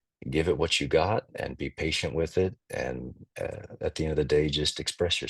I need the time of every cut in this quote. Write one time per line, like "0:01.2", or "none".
none